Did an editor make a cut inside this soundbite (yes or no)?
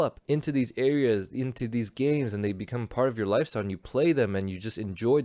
no